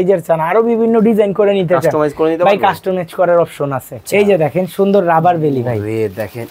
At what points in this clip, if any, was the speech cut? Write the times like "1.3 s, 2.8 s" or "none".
4.0 s